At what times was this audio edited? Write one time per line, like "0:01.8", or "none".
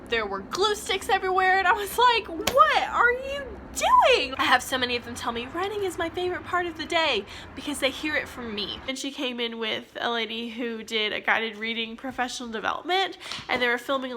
0:04.3
0:08.9